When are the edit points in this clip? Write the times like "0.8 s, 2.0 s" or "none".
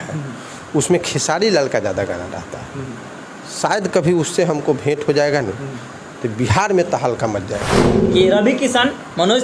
7.9 s